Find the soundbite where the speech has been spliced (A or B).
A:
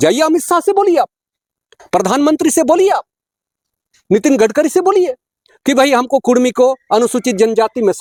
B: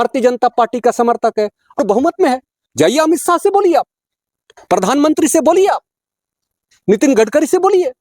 B